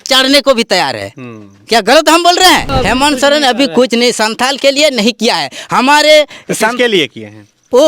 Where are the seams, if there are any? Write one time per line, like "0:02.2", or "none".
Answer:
0:02.7